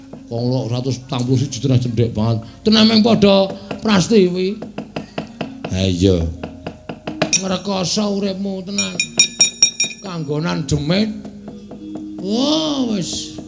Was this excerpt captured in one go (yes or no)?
no